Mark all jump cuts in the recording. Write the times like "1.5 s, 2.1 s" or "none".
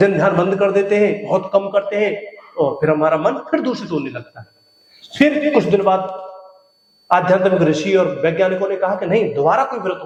none